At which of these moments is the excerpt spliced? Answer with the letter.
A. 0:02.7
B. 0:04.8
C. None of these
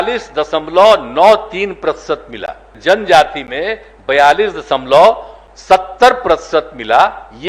A